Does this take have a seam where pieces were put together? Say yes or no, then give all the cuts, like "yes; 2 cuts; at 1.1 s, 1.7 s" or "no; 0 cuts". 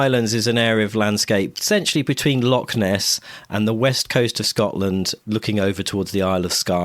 yes; 1 cut; at 1.6 s